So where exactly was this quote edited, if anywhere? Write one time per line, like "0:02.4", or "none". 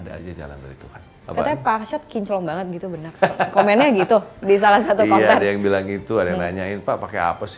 0:01.2